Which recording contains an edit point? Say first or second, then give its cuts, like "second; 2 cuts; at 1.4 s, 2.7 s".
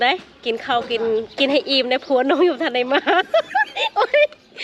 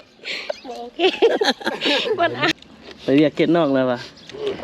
second; 1 cut; at 2.6 s